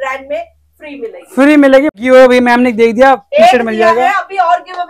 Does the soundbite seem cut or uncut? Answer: cut